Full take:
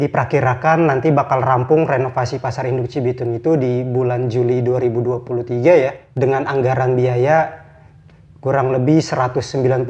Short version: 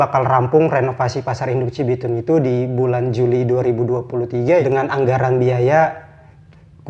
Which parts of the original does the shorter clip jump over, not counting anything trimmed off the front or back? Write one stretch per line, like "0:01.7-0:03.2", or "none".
0:05.8-0:06.2